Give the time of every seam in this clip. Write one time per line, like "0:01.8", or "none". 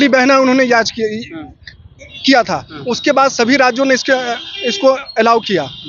none